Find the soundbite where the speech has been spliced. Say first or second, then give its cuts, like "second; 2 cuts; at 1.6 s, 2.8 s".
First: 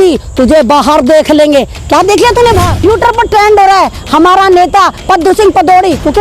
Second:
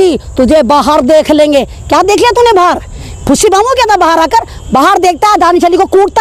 first; 1 cut; at 2.7 s